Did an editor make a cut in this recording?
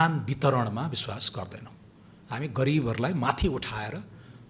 no; 0 cuts

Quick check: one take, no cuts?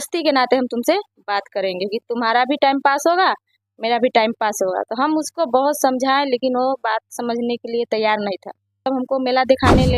no; 1 cut; at 8.9 s

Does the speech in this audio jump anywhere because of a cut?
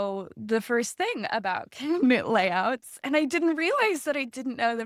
no; 0 cuts

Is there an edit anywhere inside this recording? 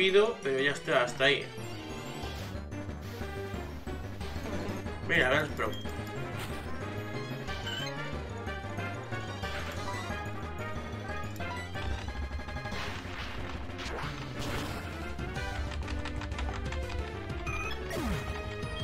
no; 0 cuts

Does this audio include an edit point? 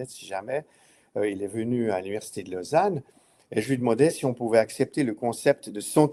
no; 0 cuts

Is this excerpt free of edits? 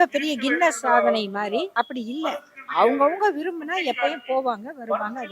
no; 1 cut; at 1.7 s

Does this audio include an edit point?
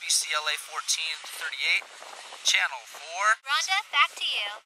yes; 1 cut; at 3.4 s

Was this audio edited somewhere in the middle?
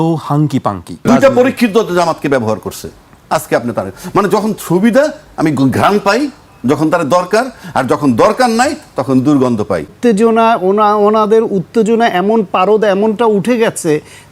yes; 2 cuts; at 1.0 s, 9.9 s

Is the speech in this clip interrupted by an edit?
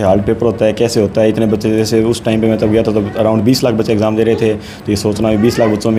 no; 0 cuts

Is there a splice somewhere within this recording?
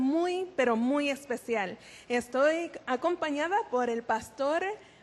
no; 0 cuts

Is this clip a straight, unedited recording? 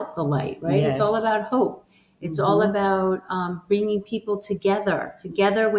yes; 0 cuts

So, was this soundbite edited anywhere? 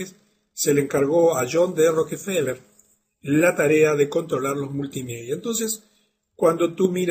no; 0 cuts

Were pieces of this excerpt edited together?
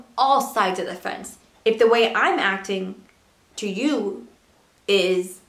yes; 1 cut; at 1.4 s

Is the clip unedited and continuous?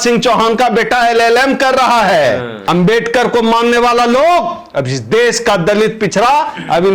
no; 1 cut; at 2.5 s

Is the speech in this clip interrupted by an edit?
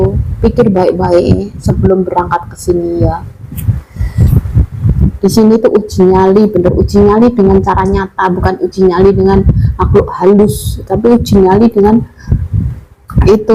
no; 0 cuts

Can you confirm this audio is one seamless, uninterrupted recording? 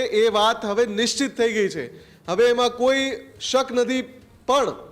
yes; 0 cuts

